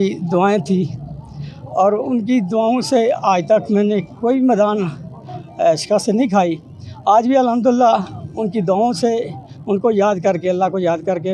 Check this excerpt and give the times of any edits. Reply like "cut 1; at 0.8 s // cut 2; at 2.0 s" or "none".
none